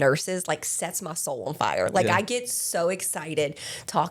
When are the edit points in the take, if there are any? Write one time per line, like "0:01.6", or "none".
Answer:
none